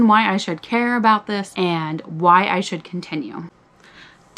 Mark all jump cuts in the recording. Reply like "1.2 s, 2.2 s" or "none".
3.4 s